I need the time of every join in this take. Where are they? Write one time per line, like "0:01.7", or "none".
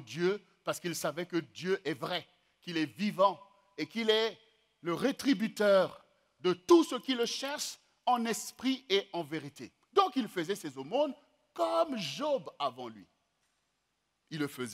none

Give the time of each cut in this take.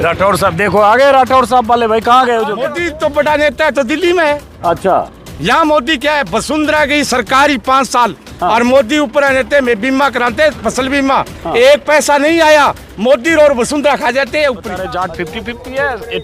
0:02.8
0:14.9

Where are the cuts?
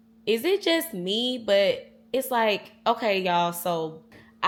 none

